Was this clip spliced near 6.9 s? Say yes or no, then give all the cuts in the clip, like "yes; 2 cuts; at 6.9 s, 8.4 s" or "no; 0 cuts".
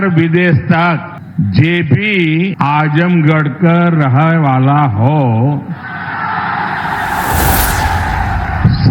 no; 2 cuts; at 1.2 s, 2.5 s